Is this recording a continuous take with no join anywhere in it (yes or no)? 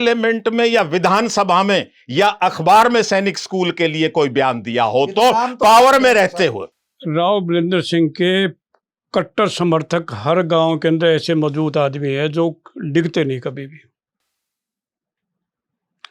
no